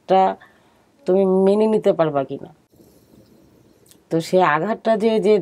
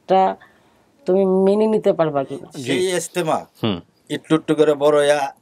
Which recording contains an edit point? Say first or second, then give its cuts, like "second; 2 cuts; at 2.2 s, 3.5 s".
second; 1 cut; at 2.5 s